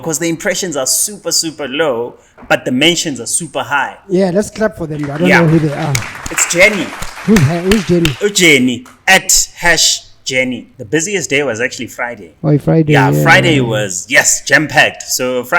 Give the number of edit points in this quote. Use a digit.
1